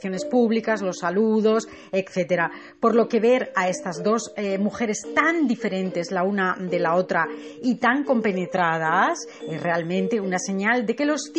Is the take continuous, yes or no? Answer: yes